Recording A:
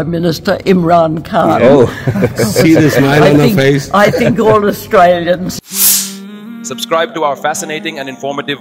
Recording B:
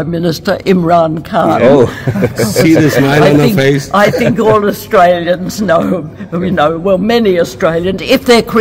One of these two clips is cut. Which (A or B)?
A